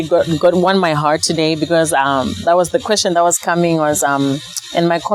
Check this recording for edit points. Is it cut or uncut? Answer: uncut